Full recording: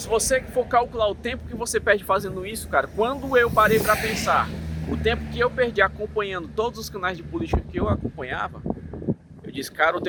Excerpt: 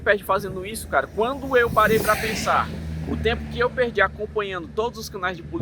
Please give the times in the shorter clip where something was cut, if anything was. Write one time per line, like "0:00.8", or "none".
none